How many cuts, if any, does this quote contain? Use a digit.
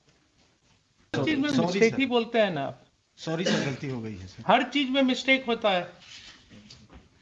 1